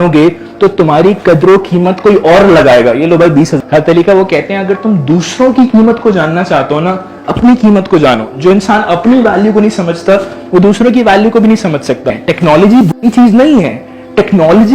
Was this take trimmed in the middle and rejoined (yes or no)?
yes